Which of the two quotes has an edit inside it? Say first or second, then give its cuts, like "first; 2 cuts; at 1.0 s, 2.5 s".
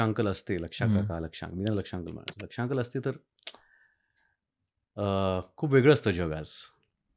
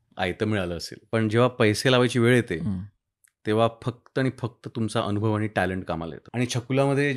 second; 2 cuts; at 0.9 s, 6.2 s